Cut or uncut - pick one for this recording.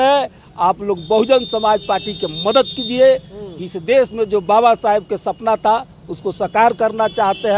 uncut